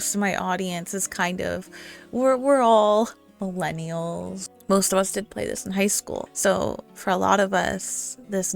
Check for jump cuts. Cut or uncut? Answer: cut